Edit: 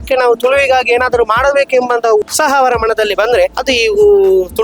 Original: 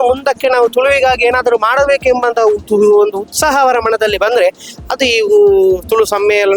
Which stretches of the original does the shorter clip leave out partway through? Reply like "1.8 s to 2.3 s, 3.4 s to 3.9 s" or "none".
2.6 s to 3.3 s, 4.6 s to 4.9 s